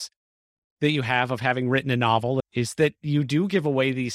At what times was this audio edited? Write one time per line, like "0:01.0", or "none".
0:02.5